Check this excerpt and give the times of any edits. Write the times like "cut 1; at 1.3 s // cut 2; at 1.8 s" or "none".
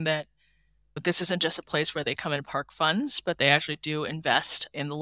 none